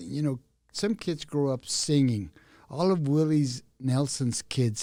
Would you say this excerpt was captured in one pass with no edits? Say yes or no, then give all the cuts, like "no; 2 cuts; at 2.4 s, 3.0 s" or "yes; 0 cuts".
yes; 0 cuts